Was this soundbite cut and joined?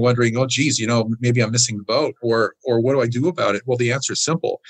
no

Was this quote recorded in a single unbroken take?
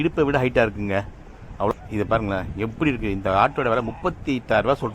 no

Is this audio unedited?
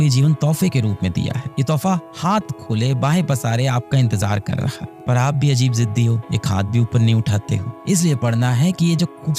no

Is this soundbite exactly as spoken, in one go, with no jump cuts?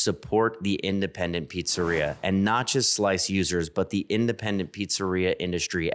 yes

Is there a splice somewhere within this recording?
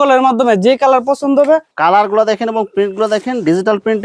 yes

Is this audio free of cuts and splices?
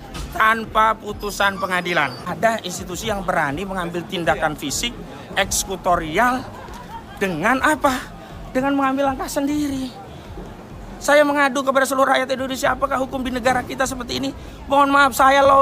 no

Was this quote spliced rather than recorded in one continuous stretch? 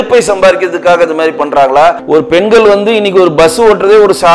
yes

